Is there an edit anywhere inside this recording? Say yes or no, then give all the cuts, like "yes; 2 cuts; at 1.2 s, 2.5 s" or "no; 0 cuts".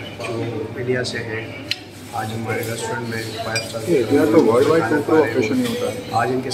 no; 0 cuts